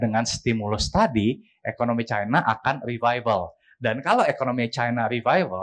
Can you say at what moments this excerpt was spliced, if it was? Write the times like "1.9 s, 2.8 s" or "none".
none